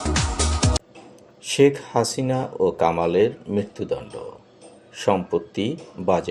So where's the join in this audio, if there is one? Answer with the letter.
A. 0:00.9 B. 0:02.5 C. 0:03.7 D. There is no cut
A